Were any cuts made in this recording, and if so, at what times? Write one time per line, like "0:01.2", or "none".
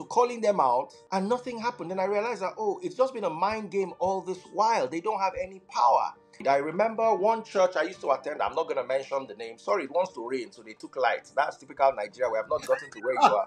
0:01.0
0:06.4